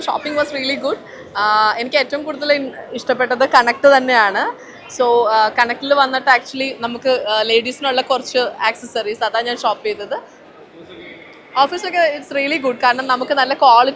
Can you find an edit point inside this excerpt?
no; 0 cuts

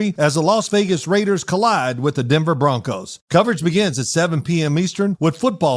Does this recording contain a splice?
yes; 1 cut; at 3.1 s

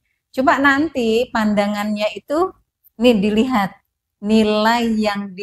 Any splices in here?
no; 0 cuts

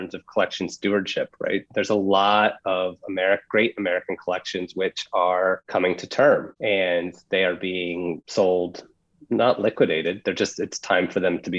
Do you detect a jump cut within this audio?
no; 0 cuts

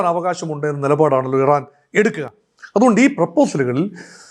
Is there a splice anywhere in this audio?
no; 0 cuts

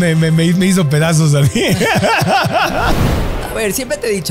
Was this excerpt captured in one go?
no; 1 cut; at 3.0 s

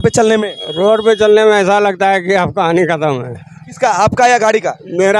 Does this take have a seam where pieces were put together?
no; 0 cuts

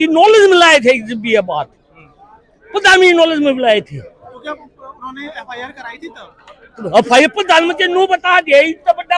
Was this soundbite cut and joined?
no; 0 cuts

